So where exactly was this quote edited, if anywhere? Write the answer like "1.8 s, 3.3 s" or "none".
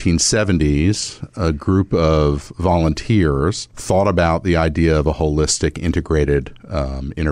3.7 s